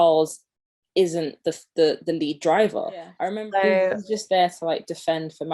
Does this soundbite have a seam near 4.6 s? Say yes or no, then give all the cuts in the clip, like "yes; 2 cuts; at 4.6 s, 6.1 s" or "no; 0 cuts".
no; 1 cut; at 3.2 s